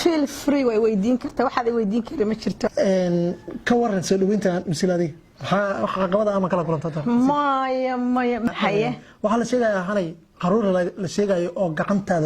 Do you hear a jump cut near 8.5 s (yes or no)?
yes